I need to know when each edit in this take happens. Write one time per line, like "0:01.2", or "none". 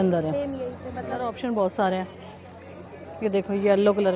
0:01.3